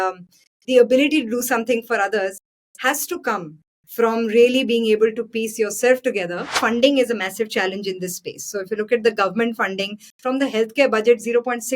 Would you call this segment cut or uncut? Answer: cut